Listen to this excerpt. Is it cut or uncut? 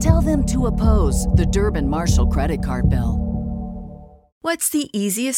cut